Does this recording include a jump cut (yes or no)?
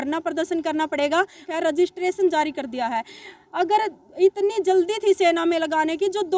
yes